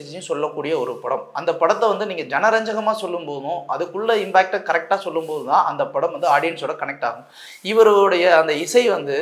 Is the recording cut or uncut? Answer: uncut